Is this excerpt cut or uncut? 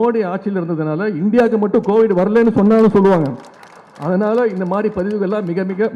uncut